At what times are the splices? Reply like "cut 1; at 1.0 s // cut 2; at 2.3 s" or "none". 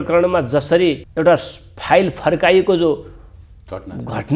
cut 1; at 1.0 s